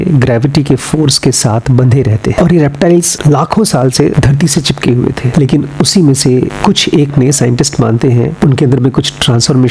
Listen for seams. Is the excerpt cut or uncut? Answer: cut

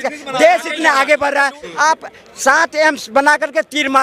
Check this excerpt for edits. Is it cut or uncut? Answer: cut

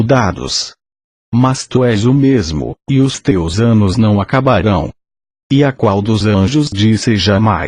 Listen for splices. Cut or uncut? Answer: cut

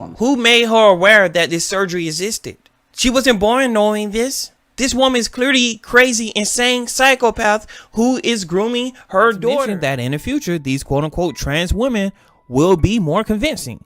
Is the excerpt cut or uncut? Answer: cut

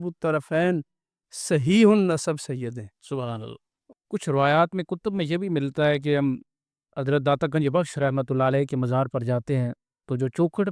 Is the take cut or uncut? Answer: cut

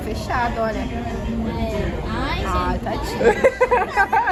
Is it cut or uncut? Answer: uncut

